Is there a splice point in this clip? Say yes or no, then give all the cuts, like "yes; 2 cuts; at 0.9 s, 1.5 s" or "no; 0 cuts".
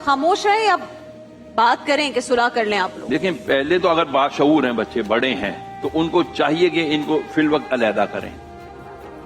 no; 0 cuts